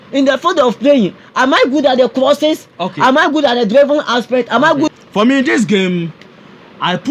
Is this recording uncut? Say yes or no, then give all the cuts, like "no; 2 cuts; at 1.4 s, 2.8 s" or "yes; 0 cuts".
no; 1 cut; at 4.9 s